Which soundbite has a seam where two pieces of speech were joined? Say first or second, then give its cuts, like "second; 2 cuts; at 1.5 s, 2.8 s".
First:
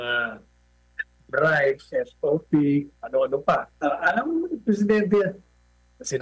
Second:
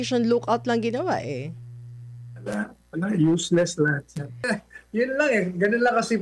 second; 1 cut; at 4.5 s